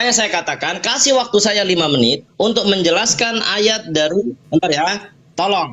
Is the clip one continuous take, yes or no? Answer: no